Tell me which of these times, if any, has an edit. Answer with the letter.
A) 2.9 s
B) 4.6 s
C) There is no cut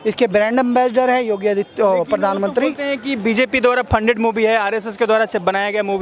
C